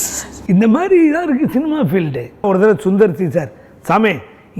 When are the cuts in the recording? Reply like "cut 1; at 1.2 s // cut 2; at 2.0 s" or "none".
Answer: cut 1; at 2.4 s